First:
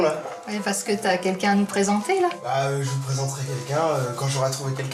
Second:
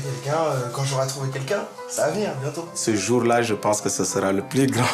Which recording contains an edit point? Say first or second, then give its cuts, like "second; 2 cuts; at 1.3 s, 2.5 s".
second; 1 cut; at 2.8 s